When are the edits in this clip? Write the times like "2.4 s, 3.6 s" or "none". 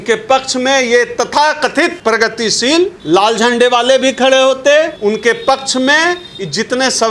2.0 s, 3.0 s, 4.9 s